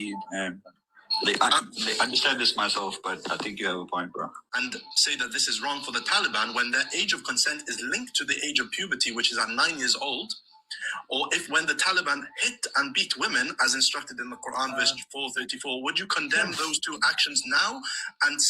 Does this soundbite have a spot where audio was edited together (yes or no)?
yes